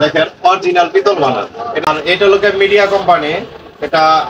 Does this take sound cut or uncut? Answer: cut